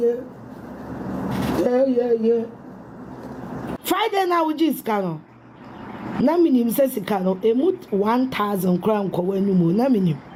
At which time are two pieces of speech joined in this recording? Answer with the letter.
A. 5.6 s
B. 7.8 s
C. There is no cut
C